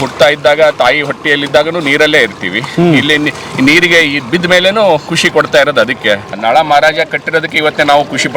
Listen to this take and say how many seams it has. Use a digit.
1